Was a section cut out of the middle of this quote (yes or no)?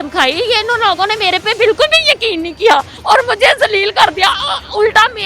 yes